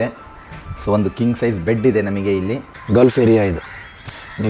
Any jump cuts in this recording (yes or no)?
yes